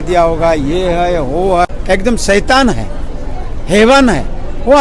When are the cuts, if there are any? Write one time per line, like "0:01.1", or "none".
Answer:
0:01.8